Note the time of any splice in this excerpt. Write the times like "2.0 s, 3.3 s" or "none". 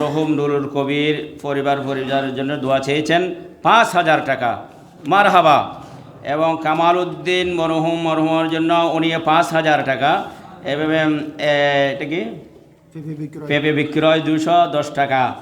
none